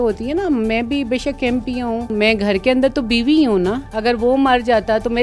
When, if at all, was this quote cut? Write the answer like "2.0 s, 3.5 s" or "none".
2.1 s, 3.9 s